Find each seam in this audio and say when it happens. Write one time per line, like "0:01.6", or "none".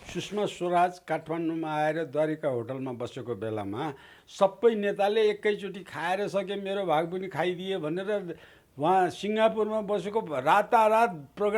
0:04.2